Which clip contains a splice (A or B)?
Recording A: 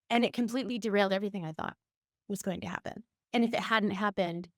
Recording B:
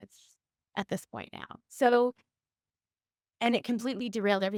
A